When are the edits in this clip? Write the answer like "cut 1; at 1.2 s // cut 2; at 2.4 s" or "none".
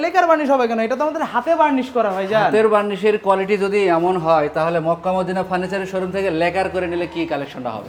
none